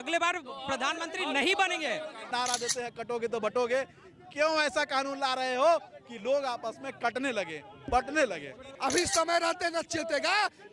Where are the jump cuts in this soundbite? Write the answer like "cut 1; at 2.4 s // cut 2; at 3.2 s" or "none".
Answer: cut 1; at 2.3 s // cut 2; at 8.7 s